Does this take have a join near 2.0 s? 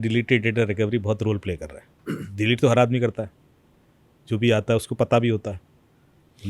yes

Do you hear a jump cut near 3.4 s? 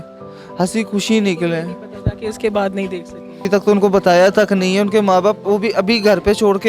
yes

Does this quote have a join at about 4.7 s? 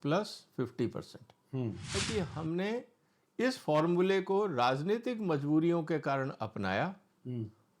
no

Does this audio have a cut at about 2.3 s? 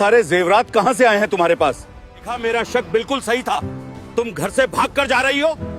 yes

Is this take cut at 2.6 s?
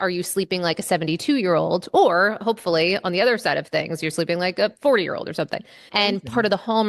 no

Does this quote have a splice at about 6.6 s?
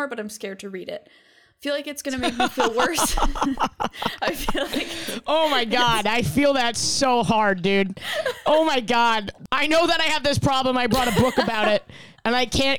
no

